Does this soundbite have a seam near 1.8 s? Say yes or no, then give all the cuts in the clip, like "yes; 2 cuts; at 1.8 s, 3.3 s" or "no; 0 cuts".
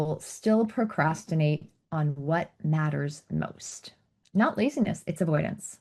no; 1 cut; at 4.1 s